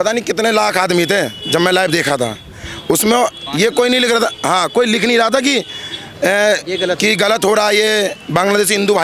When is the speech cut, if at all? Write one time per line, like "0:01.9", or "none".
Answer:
none